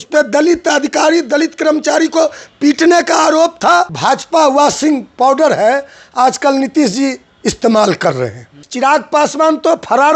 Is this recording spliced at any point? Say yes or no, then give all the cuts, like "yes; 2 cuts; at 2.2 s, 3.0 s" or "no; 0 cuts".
yes; 2 cuts; at 3.9 s, 8.6 s